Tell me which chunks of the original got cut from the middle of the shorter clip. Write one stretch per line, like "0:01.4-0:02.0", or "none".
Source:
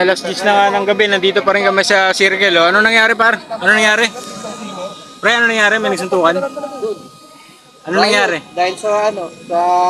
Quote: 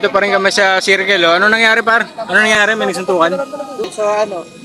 0:03.9-0:05.6
0:06.9-0:08.7